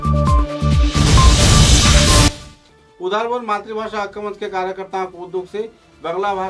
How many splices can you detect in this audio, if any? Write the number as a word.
one